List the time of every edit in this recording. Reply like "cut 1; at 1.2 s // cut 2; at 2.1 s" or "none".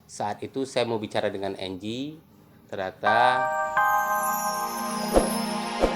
cut 1; at 3.3 s